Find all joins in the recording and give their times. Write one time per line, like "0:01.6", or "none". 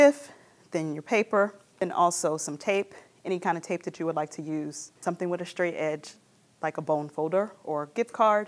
0:01.6
0:05.0